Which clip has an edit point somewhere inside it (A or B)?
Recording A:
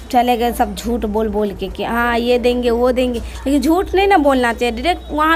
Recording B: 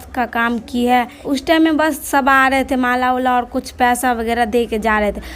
B